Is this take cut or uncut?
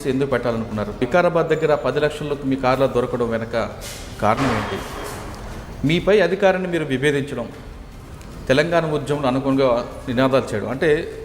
cut